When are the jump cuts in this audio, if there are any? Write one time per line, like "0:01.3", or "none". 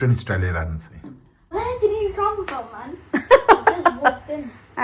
0:01.5

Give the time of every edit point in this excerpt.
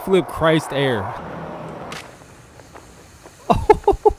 0:01.2

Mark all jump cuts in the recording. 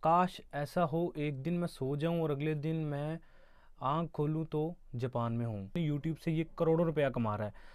0:05.8

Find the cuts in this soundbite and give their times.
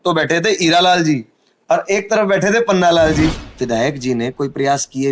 0:03.5

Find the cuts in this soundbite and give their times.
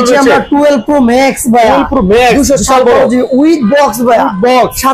none

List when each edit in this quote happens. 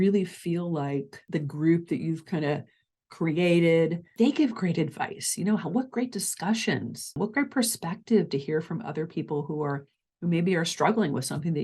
0:01.2
0:04.1
0:07.2

